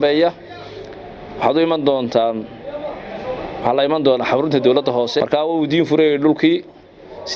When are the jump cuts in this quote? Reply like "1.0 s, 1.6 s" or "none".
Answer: 5.2 s